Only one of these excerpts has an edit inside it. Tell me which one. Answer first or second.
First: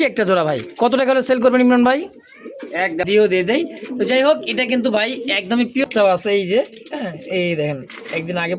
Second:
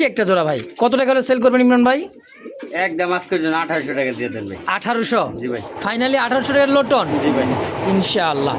first